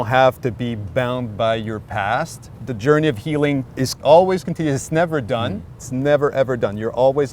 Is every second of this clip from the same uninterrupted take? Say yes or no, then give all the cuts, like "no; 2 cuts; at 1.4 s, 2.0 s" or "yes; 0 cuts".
no; 3 cuts; at 2.5 s, 3.9 s, 5.8 s